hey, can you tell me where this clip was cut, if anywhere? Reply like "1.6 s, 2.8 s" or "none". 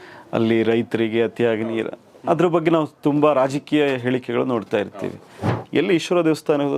5.4 s